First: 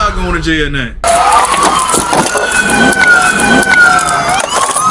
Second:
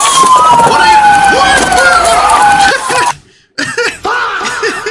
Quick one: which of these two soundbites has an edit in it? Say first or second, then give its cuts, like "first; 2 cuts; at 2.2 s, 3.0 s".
first; 1 cut; at 1.0 s